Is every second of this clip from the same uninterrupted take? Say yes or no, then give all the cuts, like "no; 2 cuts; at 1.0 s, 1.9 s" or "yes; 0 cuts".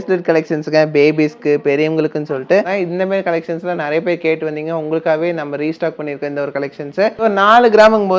no; 2 cuts; at 2.7 s, 7.2 s